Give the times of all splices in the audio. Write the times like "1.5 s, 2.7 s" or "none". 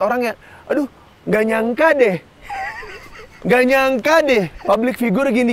2.4 s, 4.5 s